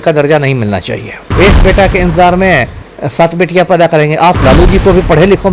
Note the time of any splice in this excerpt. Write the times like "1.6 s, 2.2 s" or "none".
1.2 s, 4.4 s

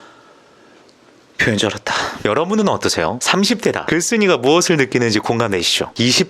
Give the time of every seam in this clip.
2.1 s

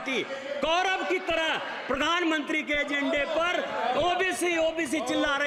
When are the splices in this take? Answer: none

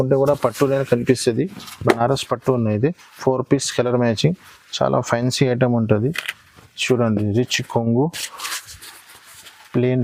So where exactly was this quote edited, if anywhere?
none

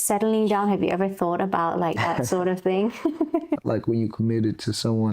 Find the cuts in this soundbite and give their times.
3.6 s

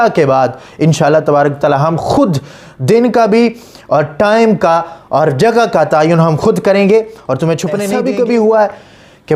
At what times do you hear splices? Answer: 7.7 s

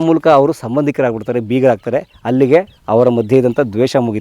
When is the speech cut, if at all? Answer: 2.8 s

